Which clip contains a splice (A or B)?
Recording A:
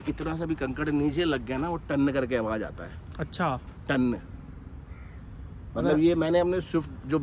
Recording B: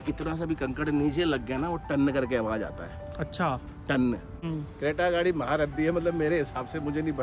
B